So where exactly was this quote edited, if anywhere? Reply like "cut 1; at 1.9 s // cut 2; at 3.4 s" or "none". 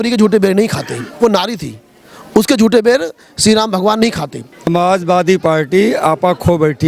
cut 1; at 4.7 s